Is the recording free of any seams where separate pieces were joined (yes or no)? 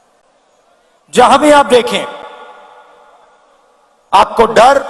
no